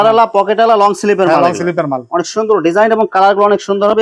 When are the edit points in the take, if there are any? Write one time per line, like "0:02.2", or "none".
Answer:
none